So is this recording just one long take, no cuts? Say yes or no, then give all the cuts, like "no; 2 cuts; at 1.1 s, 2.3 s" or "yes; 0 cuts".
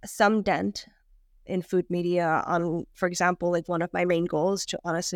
yes; 0 cuts